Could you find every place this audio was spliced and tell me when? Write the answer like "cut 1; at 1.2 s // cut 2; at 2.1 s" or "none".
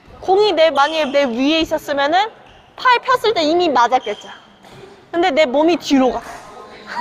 none